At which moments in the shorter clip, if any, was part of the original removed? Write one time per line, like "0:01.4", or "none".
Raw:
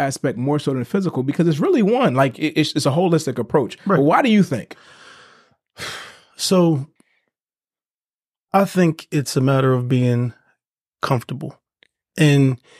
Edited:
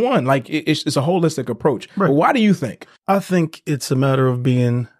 0:02.9